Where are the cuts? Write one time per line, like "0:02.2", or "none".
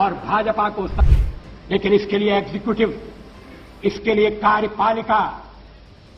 0:01.0